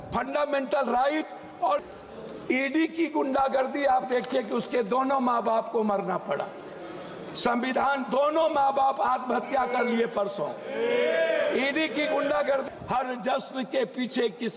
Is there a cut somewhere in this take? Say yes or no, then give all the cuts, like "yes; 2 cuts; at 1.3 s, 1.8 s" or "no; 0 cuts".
yes; 2 cuts; at 1.8 s, 12.7 s